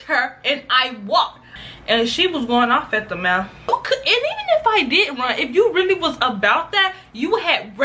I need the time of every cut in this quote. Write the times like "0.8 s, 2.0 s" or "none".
1.6 s, 3.7 s